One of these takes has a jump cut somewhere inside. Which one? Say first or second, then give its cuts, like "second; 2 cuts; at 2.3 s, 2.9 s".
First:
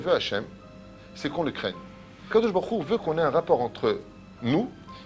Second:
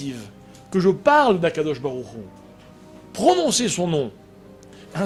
first; 1 cut; at 2.3 s